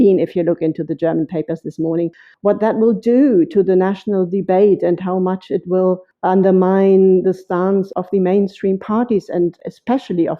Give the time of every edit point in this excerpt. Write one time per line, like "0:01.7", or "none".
0:02.2
0:06.1
0:07.9